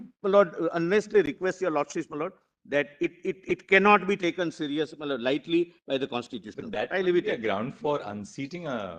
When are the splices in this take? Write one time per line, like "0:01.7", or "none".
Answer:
none